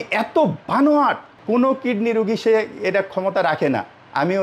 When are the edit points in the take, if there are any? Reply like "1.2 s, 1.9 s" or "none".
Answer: 1.3 s